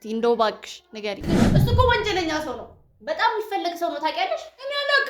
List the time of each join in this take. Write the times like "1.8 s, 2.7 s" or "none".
1.4 s